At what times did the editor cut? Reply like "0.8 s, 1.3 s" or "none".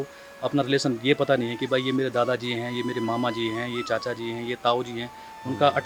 none

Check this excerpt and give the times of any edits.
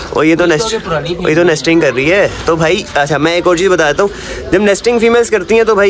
none

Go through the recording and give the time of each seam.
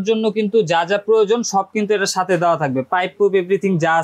none

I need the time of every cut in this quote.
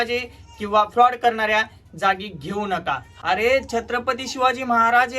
3.1 s

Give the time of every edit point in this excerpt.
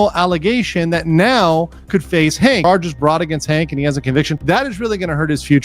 2.6 s

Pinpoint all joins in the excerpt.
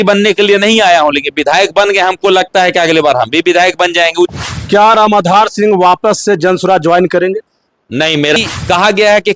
4.3 s, 8.4 s

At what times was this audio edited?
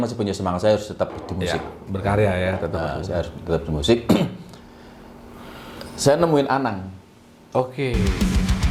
none

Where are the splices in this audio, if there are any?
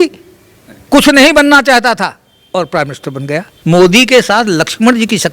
3.5 s

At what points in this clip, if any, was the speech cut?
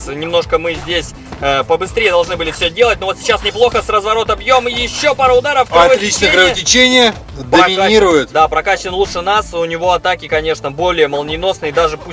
7.3 s

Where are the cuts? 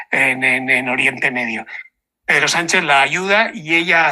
none

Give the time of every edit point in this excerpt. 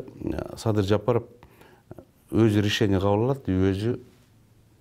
none

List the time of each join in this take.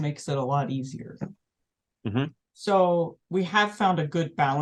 none

